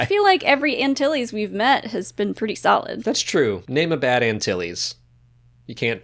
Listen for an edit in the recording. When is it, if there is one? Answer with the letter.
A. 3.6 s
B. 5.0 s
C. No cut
A